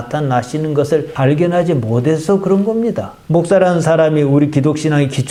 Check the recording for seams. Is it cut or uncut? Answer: uncut